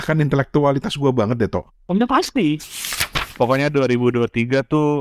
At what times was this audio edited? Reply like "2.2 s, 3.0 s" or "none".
3.2 s